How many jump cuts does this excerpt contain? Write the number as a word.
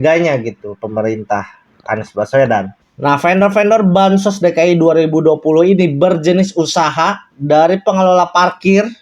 one